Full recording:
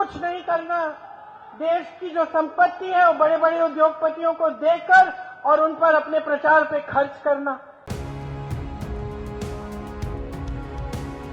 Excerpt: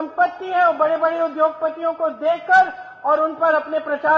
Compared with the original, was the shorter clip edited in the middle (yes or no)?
no